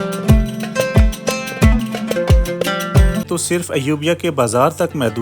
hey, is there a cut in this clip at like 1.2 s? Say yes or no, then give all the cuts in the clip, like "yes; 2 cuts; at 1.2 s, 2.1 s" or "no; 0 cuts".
no; 1 cut; at 3.2 s